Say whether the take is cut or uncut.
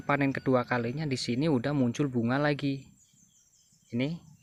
uncut